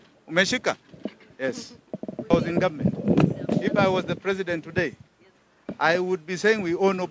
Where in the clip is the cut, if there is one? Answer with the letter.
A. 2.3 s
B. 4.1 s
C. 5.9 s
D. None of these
A